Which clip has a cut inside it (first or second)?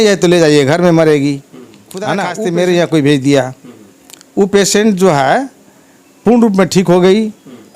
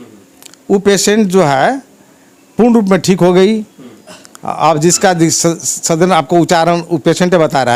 first